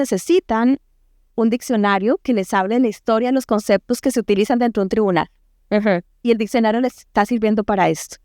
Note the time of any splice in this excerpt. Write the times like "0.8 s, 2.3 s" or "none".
none